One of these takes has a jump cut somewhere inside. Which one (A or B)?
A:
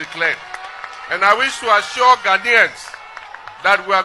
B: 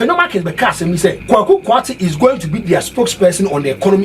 B